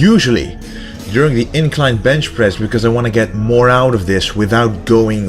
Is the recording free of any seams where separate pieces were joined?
no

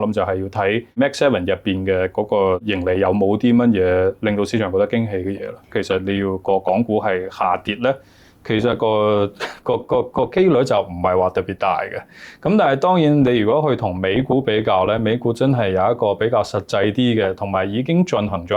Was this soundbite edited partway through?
yes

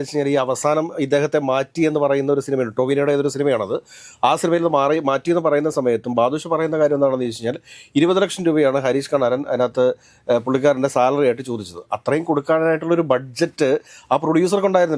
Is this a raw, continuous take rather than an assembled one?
yes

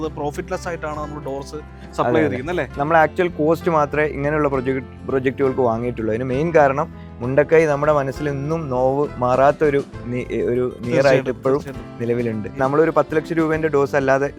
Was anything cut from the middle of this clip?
no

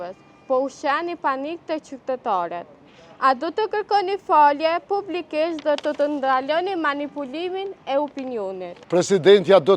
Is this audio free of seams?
no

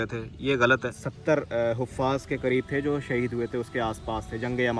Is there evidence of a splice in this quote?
no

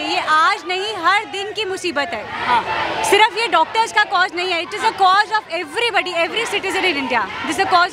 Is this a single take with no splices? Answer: yes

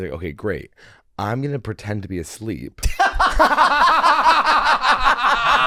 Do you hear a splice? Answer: no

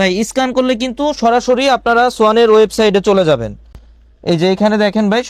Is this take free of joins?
yes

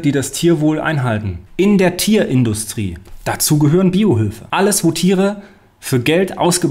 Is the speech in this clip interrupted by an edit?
yes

